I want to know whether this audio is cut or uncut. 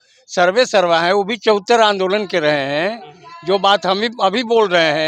uncut